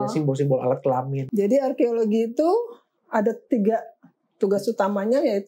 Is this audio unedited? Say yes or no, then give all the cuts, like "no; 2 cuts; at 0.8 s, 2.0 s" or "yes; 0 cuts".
no; 1 cut; at 1.2 s